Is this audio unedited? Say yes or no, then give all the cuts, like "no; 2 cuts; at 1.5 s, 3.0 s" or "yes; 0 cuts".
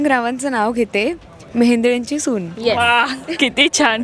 yes; 0 cuts